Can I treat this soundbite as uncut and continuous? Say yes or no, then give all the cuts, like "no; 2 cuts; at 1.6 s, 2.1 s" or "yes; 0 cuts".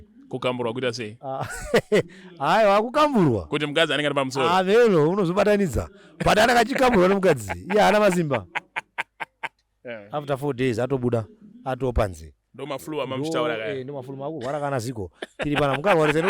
no; 1 cut; at 9.6 s